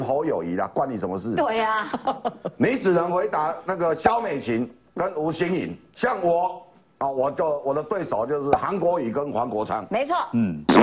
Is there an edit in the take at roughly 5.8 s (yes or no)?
yes